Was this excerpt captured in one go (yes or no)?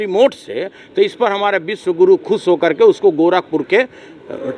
yes